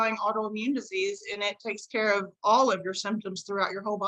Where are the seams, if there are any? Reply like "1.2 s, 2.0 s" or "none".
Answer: none